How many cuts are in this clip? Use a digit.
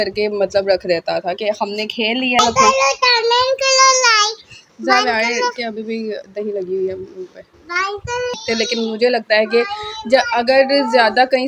2